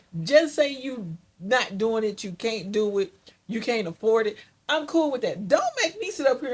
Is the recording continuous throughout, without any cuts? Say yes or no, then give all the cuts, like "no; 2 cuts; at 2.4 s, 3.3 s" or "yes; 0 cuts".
yes; 0 cuts